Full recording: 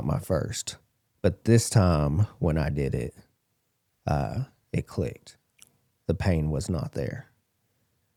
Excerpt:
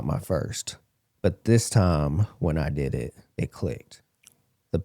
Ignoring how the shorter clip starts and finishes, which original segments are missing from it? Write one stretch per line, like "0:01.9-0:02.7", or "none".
0:03.2-0:04.6